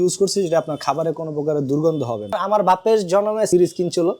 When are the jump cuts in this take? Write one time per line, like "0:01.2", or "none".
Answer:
0:02.4
0:03.5